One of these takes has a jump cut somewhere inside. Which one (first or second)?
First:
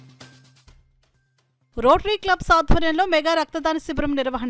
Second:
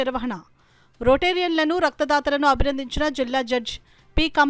first